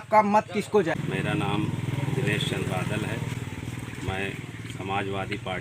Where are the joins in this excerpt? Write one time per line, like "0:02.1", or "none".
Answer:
0:01.0